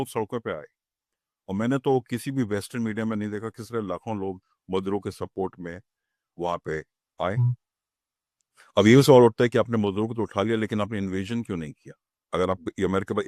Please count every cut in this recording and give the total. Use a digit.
0